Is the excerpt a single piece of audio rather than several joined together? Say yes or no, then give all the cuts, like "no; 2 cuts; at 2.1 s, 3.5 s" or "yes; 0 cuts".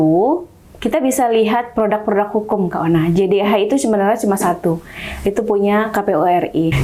yes; 0 cuts